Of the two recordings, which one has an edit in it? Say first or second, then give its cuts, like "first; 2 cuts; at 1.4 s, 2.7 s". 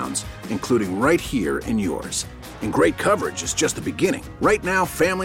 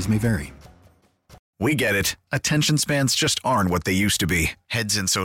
second; 1 cut; at 1.4 s